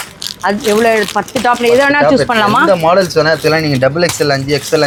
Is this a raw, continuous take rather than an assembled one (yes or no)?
yes